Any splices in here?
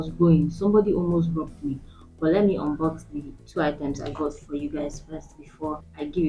no; 0 cuts

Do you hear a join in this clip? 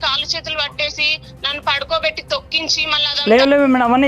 yes; 1 cut; at 2.9 s

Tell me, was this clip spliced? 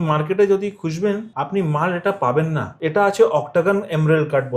yes; 2 cuts; at 1.3 s, 2.7 s

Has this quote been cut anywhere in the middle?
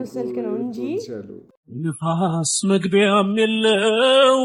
no; 0 cuts

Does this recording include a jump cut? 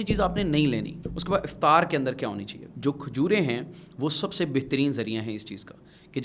yes; 2 cuts; at 1.0 s, 2.7 s

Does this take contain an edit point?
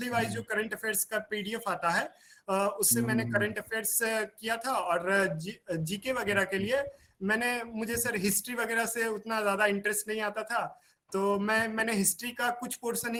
no; 0 cuts

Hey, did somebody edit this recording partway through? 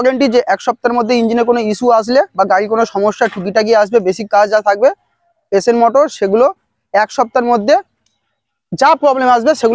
no; 0 cuts

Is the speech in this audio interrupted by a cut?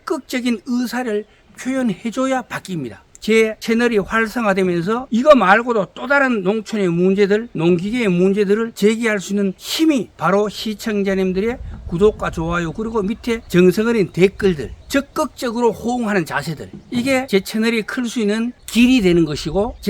yes; 3 cuts; at 13.4 s, 14.7 s, 17.1 s

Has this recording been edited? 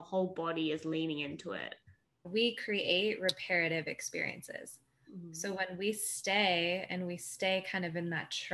yes; 1 cut; at 2.2 s

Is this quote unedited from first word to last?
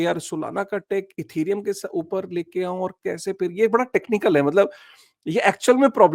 yes; 0 cuts

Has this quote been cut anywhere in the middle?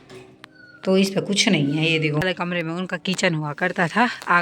yes; 1 cut; at 2.3 s

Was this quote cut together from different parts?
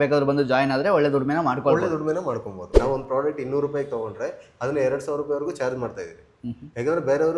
yes; 1 cut; at 2.6 s

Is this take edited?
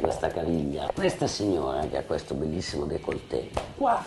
yes; 1 cut; at 0.9 s

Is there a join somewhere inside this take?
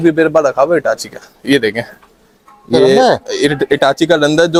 no; 0 cuts

